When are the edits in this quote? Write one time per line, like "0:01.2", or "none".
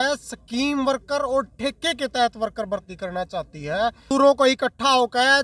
0:04.0

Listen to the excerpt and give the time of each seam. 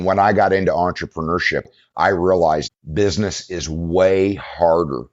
0:01.7
0:02.7

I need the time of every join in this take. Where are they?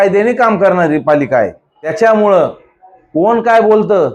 0:01.9

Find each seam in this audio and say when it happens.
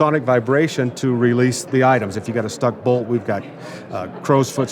0:01.6

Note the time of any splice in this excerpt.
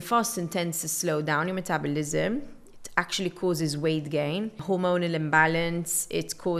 0:04.6

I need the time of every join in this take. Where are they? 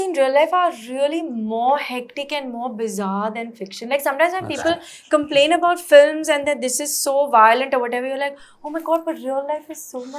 none

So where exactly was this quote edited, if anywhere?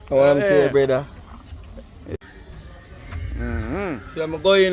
0:02.2

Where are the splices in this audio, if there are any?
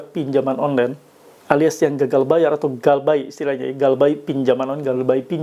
none

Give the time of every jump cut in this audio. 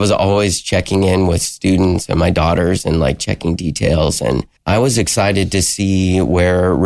0:04.5

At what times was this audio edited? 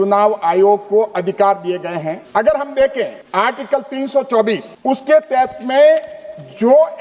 none

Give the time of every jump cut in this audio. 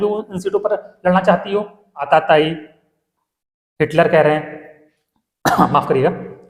0:02.1

